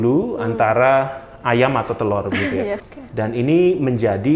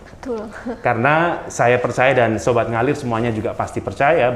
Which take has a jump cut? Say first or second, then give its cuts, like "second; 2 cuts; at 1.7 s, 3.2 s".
first; 1 cut; at 2.9 s